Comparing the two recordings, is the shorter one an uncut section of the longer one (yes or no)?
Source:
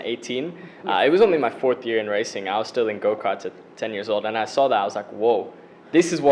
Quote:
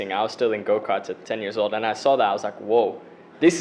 no